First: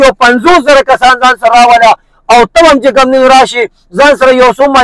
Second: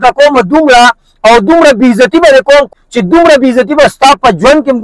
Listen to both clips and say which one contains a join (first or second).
second